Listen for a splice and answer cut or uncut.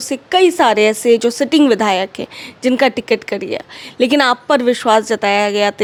uncut